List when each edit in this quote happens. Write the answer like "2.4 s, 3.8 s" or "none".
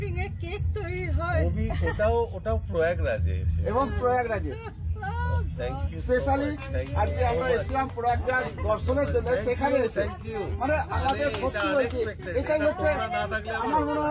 none